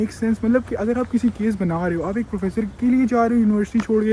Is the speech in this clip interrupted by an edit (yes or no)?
no